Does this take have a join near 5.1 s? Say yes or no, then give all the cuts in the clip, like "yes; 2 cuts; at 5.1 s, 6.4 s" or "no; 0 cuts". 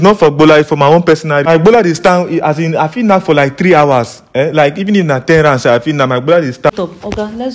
no; 2 cuts; at 1.5 s, 6.7 s